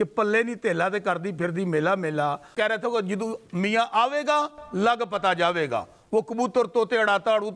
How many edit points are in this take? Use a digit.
1